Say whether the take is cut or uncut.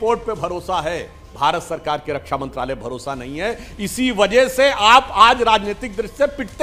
uncut